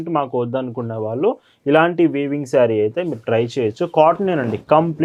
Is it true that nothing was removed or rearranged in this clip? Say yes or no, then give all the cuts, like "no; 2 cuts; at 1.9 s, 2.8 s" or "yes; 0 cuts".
yes; 0 cuts